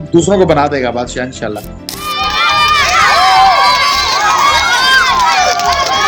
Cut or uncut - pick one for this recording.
uncut